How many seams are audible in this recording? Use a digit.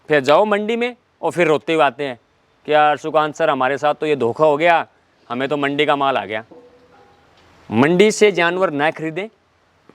1